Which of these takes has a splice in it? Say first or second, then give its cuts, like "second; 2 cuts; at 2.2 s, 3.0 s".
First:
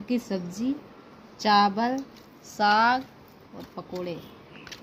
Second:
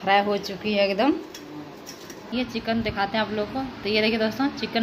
second; 1 cut; at 2.3 s